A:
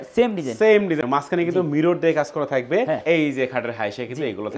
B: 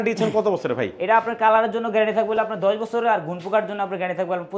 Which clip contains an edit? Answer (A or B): A